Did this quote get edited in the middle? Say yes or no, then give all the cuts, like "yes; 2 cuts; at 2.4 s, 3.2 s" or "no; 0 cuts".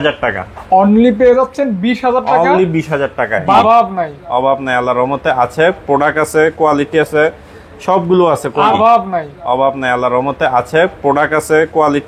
yes; 2 cuts; at 3.6 s, 8.7 s